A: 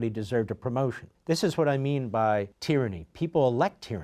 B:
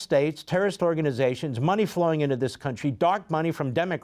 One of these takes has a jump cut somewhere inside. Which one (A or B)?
A